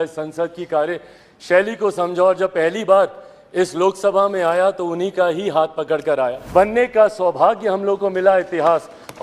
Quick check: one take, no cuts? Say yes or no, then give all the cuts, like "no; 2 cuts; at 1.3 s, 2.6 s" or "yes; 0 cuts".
no; 1 cut; at 6.4 s